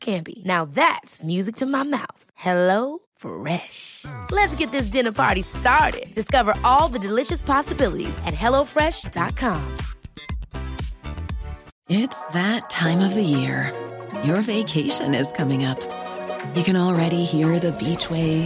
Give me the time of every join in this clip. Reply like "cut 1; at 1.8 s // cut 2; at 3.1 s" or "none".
cut 1; at 11.7 s